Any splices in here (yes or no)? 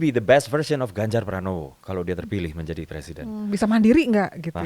no